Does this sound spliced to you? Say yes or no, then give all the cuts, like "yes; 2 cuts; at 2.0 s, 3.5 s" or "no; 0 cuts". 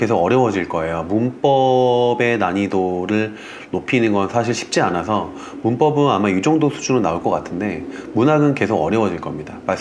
no; 0 cuts